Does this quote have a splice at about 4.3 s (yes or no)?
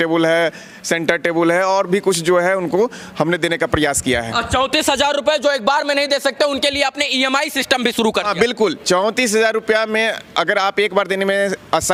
no